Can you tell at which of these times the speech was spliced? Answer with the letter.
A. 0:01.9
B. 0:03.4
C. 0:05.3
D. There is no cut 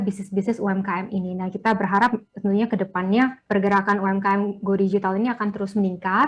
B